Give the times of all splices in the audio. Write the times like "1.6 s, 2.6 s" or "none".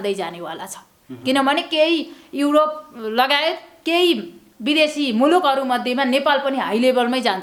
none